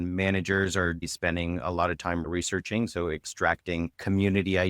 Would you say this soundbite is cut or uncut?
cut